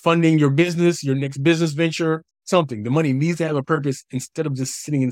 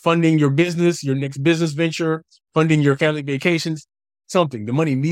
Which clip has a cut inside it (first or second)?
first